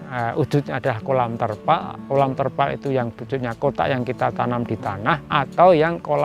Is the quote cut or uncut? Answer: uncut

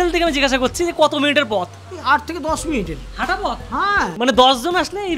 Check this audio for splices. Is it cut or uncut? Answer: cut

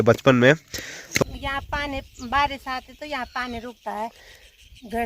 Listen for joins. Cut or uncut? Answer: cut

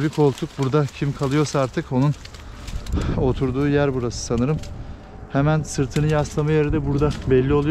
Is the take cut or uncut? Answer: uncut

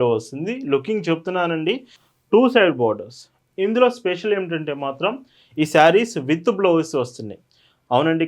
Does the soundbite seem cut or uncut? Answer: cut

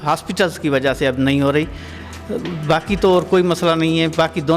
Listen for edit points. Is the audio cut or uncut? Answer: uncut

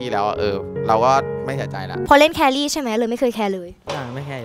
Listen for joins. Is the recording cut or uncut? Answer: cut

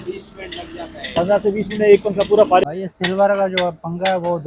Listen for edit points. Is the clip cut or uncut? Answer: cut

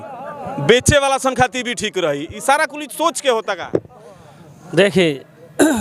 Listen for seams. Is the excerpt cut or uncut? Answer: uncut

